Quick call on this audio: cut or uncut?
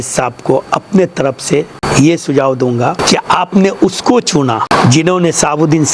cut